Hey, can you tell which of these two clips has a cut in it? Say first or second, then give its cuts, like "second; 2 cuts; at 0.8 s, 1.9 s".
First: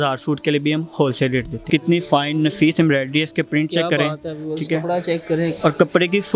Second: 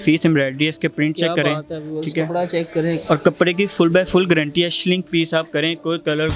first; 1 cut; at 1.5 s